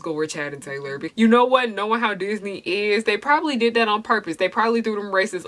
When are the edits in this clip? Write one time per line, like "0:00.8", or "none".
0:01.0